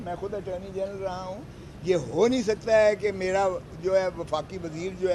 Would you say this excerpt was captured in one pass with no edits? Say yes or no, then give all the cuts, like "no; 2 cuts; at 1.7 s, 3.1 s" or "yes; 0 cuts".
yes; 0 cuts